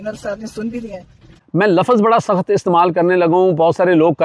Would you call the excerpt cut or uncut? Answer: cut